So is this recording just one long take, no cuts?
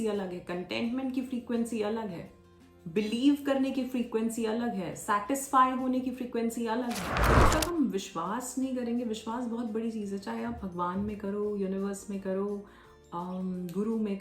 no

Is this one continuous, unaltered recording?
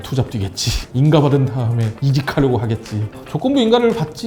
no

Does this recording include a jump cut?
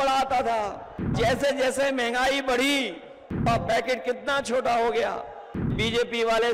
yes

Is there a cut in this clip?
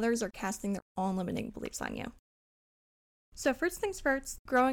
no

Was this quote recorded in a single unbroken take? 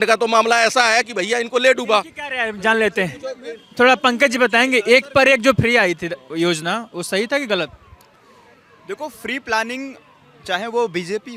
yes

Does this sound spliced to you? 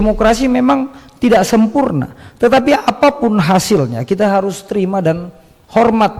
no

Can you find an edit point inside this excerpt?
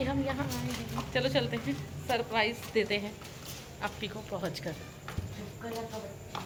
no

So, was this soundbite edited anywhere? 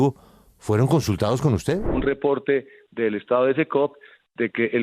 yes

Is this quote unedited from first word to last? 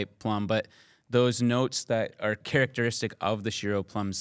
no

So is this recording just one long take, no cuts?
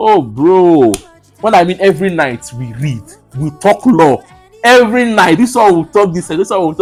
yes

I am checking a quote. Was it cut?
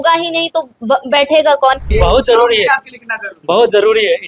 yes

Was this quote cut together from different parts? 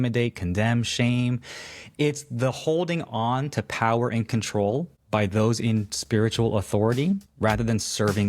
yes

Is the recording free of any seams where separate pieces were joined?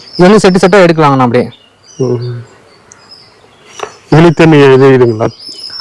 yes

